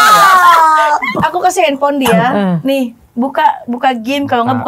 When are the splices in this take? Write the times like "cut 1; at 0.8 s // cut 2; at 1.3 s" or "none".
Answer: cut 1; at 1.1 s